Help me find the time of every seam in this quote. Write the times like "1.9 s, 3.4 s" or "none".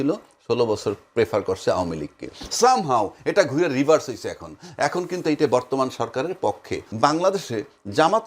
6.8 s